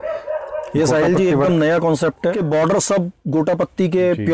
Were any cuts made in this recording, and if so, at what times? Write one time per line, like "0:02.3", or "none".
0:02.4